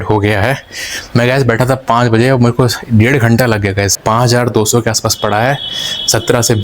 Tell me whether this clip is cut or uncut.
cut